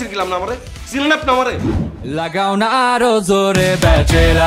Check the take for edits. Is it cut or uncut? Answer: cut